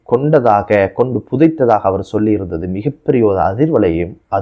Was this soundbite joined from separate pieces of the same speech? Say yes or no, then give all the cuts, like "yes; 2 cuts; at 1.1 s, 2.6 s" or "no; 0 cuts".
no; 0 cuts